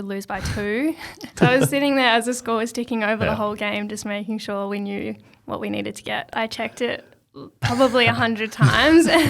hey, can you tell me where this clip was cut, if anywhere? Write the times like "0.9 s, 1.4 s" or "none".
1.2 s, 6.3 s